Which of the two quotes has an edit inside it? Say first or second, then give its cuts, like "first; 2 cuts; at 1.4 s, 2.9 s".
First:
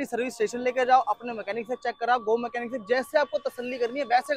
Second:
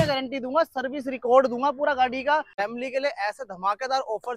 second; 1 cut; at 2.5 s